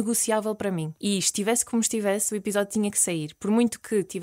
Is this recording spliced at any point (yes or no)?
yes